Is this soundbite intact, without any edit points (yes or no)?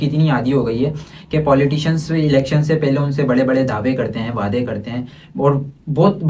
yes